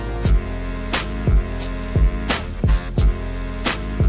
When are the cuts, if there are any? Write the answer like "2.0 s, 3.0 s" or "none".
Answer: 1.0 s